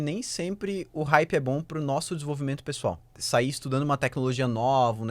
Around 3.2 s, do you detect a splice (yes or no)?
yes